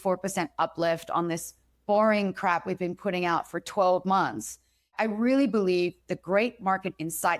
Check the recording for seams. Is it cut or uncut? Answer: uncut